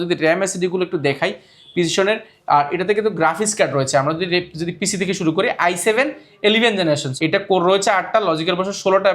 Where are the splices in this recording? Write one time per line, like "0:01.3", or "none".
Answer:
0:07.1